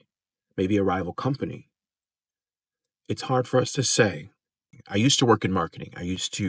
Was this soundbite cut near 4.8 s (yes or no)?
yes